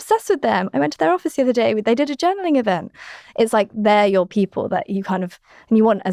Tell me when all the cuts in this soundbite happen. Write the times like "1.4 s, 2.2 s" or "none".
none